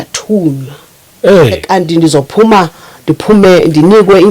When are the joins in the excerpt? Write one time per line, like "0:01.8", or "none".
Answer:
0:01.6